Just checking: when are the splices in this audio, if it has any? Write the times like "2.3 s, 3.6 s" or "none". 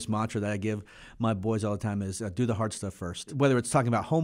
3.3 s